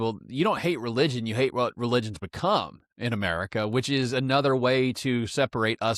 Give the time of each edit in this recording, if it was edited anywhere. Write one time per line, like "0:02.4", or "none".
none